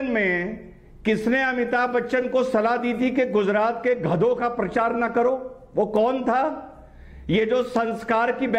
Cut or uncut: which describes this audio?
uncut